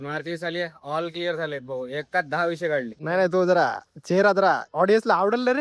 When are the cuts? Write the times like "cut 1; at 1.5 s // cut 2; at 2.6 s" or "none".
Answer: cut 1; at 3.0 s